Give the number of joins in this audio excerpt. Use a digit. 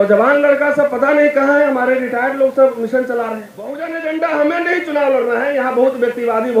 1